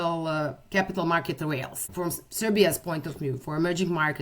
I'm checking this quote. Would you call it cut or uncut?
cut